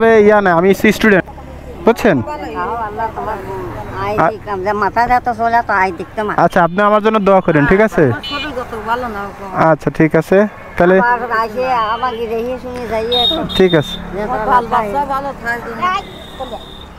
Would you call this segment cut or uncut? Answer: cut